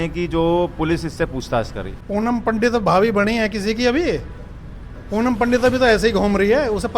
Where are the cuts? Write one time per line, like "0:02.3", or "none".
0:01.9